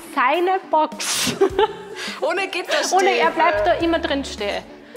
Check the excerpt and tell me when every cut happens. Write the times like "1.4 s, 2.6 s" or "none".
none

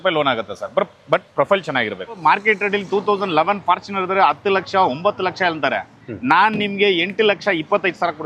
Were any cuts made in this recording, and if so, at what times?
2.2 s

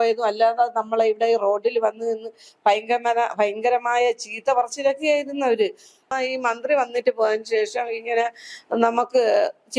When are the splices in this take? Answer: 6.0 s

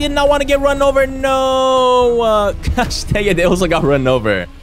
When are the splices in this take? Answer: none

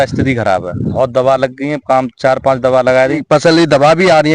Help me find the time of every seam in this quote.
0.9 s, 3.2 s

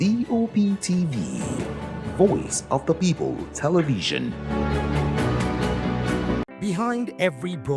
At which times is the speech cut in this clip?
6.5 s

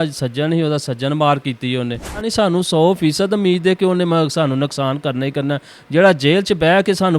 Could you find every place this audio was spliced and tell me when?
2.3 s

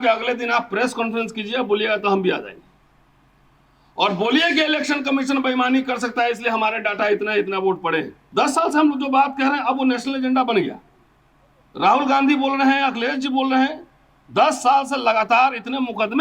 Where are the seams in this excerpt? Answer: 8.2 s

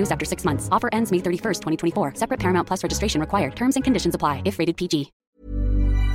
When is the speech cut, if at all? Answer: 5.2 s

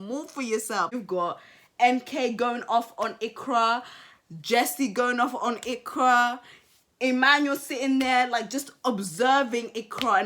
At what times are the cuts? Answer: 0.9 s

